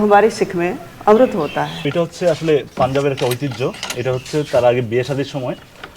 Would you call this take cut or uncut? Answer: cut